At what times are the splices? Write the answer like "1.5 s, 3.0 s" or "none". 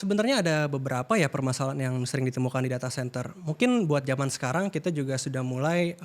none

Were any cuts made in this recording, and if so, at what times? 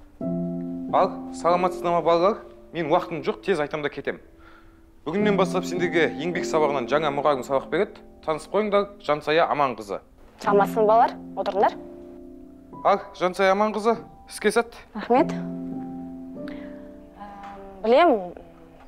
0.9 s

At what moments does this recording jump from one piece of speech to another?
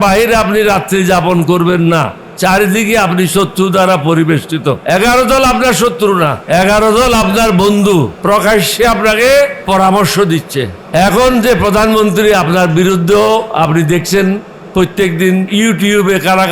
2.2 s, 4.8 s, 6.4 s, 8.1 s, 9.6 s, 10.8 s, 15.5 s

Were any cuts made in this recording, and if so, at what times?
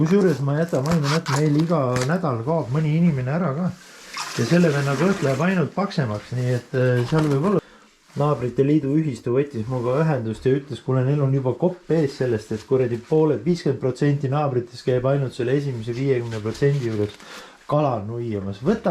7.6 s

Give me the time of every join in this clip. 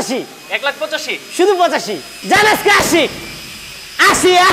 2.1 s

